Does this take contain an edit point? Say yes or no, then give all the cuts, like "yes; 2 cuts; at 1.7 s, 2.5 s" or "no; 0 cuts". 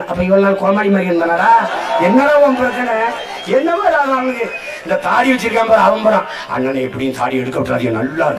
no; 0 cuts